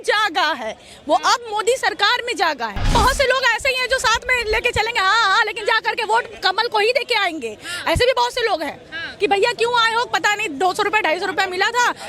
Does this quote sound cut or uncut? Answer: cut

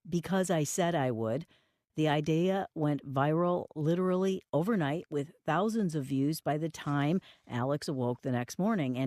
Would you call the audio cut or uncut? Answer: cut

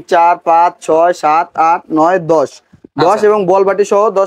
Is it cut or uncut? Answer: uncut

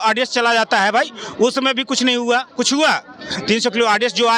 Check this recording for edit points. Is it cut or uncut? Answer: uncut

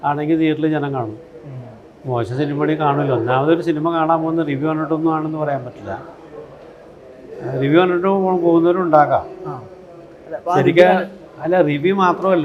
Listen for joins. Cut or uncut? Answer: uncut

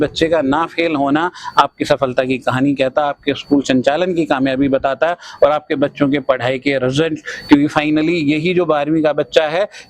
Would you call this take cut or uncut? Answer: uncut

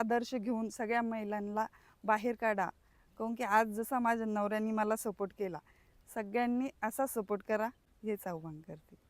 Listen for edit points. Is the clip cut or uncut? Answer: cut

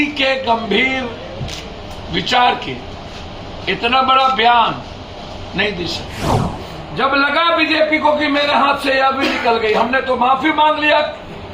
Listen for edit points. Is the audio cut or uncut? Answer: cut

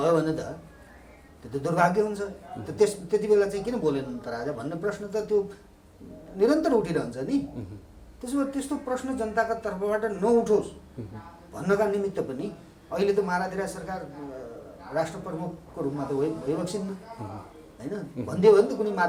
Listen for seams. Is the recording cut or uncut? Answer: uncut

